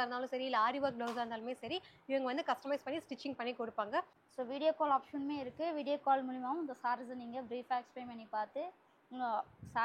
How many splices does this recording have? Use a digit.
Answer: 1